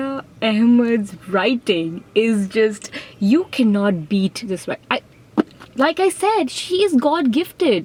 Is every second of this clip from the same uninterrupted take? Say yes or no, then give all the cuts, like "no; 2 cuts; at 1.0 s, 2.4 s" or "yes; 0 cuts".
yes; 0 cuts